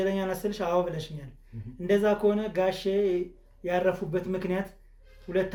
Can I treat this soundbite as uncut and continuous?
yes; 0 cuts

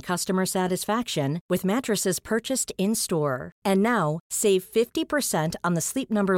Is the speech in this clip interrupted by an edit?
no; 0 cuts

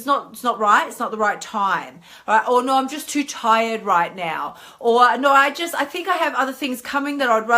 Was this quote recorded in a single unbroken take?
yes; 0 cuts

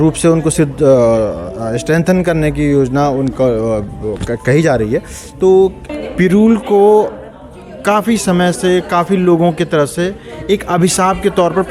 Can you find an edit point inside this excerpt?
yes; 1 cut; at 5.9 s

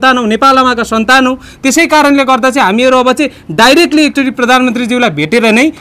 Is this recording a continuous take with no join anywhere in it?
yes; 0 cuts

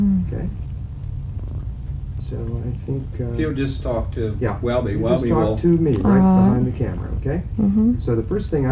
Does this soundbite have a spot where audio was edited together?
yes; 1 cut; at 7.8 s

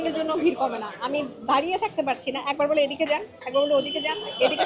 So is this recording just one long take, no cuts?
yes; 0 cuts

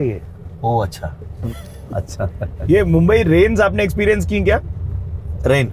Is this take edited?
yes; 2 cuts; at 1.4 s, 2.6 s

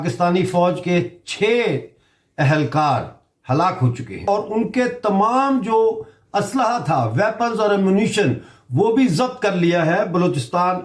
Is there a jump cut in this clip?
no; 0 cuts

